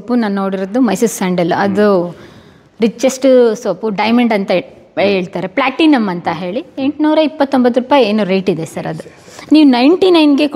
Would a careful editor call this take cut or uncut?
uncut